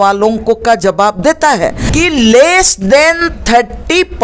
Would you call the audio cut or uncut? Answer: cut